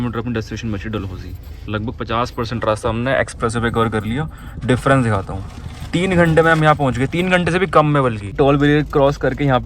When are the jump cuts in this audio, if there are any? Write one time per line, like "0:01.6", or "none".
0:08.2